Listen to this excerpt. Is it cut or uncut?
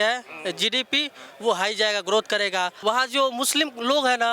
cut